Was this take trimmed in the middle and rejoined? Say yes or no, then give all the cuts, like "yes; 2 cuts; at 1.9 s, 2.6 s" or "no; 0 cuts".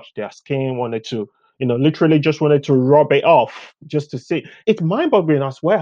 yes; 1 cut; at 4.6 s